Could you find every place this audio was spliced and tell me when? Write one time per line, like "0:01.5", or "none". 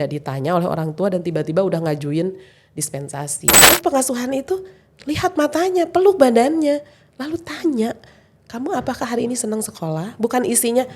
0:03.5